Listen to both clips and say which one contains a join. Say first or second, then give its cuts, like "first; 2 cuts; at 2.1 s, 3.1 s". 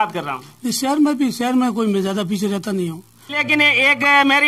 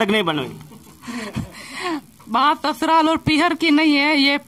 first; 1 cut; at 3.4 s